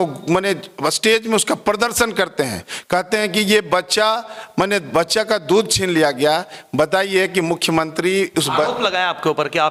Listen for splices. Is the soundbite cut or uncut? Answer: uncut